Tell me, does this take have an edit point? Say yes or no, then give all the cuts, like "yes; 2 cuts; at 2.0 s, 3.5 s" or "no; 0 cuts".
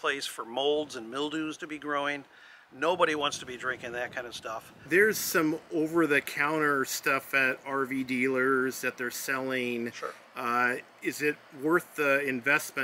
yes; 1 cut; at 4.8 s